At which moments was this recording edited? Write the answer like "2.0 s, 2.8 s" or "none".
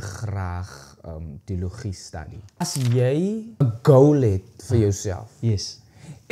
2.6 s, 3.6 s